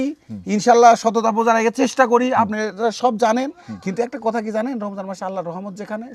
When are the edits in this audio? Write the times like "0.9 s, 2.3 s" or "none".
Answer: none